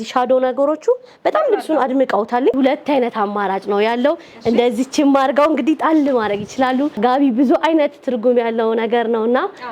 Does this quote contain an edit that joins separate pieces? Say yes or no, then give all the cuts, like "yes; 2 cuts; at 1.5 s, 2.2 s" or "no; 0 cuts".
yes; 2 cuts; at 2.5 s, 7.0 s